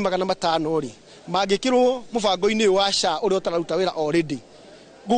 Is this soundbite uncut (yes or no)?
yes